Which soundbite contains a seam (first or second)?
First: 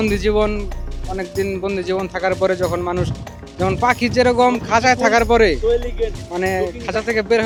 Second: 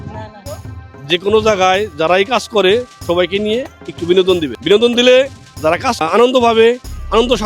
second